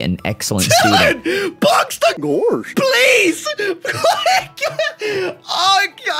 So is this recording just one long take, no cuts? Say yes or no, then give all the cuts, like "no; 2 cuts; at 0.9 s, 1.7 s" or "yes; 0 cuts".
no; 1 cut; at 2.3 s